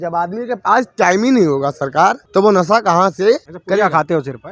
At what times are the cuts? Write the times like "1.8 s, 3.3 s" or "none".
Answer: 2.2 s, 3.5 s